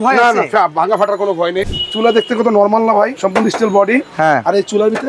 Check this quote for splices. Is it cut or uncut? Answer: cut